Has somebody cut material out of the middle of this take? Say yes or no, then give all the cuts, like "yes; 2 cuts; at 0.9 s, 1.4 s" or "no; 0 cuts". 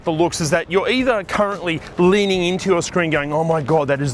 no; 0 cuts